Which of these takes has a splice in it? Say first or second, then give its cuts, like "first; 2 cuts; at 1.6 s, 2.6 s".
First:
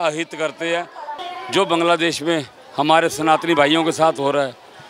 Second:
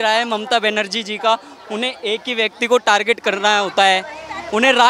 first; 1 cut; at 1.1 s